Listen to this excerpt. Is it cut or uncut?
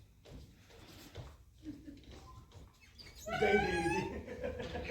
uncut